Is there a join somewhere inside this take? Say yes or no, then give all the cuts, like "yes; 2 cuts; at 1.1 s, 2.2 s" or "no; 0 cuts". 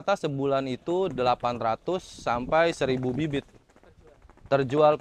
no; 0 cuts